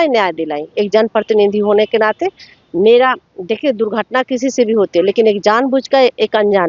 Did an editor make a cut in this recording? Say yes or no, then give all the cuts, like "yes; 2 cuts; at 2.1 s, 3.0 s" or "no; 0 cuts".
no; 0 cuts